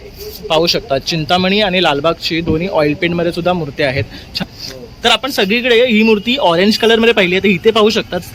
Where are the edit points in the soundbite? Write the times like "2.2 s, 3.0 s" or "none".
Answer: 4.4 s